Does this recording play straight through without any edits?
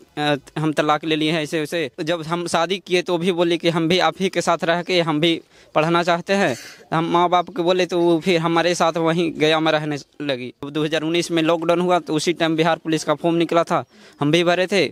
no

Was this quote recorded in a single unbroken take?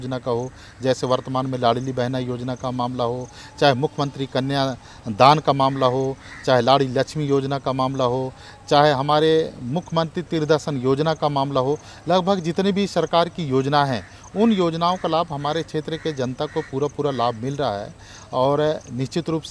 yes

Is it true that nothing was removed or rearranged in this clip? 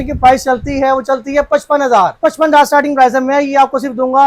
no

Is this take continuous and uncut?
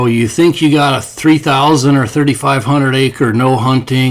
no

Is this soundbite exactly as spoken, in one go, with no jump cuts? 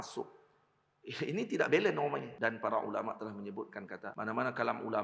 no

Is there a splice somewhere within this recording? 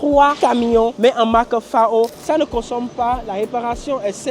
yes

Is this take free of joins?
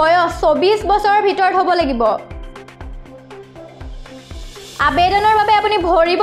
yes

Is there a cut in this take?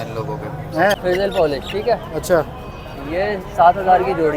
yes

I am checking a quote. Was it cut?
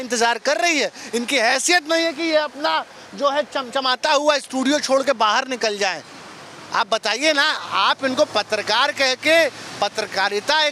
no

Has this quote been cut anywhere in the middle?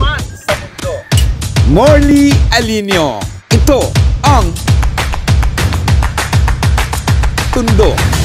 no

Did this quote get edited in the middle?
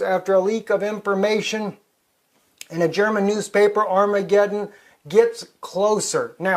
yes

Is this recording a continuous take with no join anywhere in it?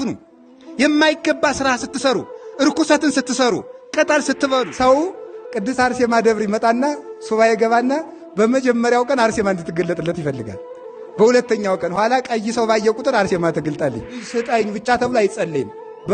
no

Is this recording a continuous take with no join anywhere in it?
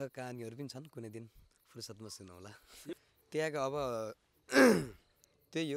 no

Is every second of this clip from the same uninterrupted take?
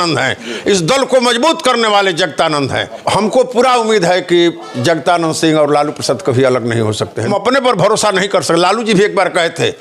no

